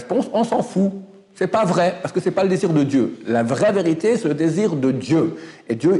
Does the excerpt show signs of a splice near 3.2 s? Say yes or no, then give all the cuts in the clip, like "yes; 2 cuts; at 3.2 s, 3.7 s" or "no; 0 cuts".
no; 0 cuts